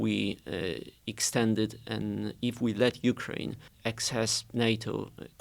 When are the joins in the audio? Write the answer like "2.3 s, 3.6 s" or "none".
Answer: 3.6 s